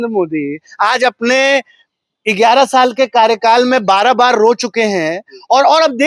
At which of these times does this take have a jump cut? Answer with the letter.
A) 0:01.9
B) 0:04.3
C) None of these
C